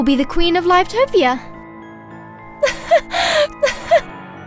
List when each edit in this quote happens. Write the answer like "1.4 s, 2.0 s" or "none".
none